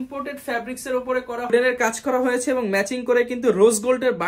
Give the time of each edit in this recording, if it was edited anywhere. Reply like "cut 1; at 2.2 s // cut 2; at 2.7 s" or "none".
cut 1; at 1.5 s